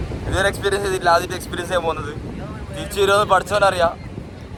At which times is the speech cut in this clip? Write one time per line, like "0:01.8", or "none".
none